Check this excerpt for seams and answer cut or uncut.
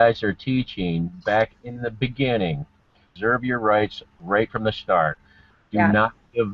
cut